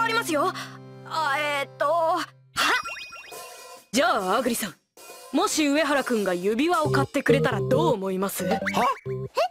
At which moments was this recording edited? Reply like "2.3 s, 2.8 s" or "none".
6.3 s